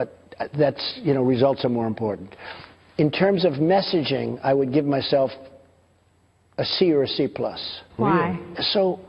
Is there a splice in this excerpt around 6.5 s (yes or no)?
no